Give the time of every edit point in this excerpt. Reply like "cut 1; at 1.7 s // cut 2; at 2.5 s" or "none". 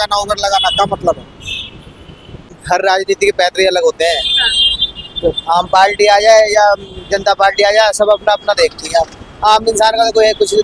cut 1; at 2.5 s